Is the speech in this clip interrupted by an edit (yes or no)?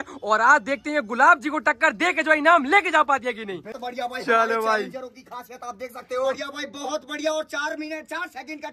yes